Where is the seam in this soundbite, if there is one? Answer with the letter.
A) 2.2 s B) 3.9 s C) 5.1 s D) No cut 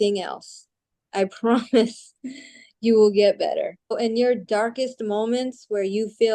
B